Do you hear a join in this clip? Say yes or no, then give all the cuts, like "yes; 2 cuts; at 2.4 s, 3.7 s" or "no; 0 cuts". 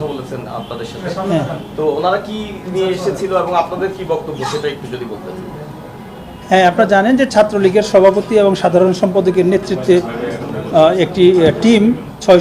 no; 0 cuts